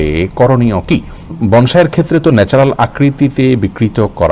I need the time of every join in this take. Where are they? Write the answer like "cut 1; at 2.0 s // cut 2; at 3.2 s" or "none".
cut 1; at 1.4 s